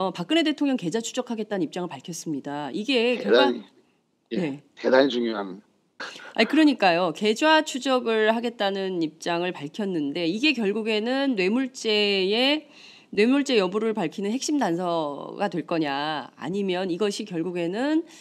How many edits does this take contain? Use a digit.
0